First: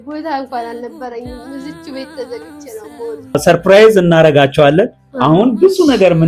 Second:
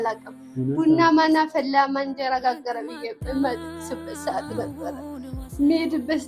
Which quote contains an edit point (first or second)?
first